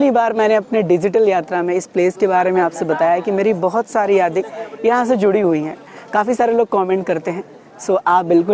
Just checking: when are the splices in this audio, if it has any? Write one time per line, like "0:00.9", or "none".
none